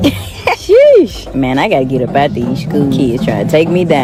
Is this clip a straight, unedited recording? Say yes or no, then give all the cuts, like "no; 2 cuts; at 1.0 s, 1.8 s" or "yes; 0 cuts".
yes; 0 cuts